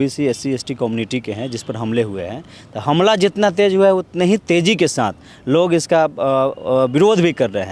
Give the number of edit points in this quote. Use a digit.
0